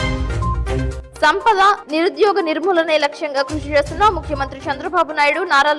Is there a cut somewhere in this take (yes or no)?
yes